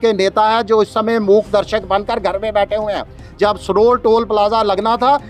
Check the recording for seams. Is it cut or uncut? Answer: uncut